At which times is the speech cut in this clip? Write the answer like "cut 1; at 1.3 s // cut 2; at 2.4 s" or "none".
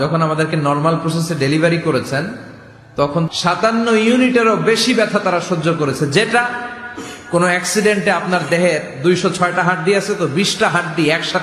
cut 1; at 3.3 s